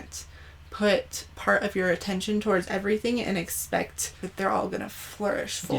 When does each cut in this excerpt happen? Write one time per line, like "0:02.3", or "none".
0:04.2